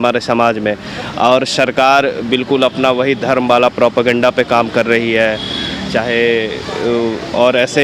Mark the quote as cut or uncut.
uncut